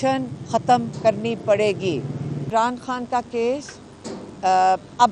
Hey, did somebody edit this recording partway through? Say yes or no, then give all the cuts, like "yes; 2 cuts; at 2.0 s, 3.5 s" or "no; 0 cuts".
yes; 1 cut; at 2.4 s